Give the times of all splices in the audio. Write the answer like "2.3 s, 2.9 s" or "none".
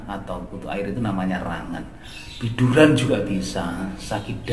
none